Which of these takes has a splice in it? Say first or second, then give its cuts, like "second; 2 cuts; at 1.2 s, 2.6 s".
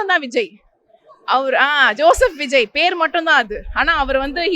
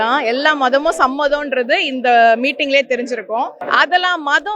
second; 1 cut; at 3.6 s